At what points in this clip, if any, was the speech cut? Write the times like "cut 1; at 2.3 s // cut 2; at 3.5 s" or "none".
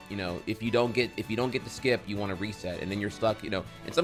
none